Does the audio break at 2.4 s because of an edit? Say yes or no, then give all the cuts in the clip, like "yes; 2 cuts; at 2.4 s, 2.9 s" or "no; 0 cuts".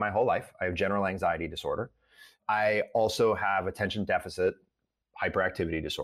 yes; 1 cut; at 2.4 s